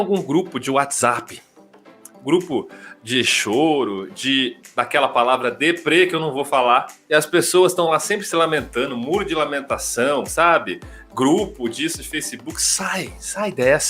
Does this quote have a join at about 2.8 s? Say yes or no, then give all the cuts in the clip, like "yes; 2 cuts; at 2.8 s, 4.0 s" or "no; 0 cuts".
no; 1 cut; at 7.0 s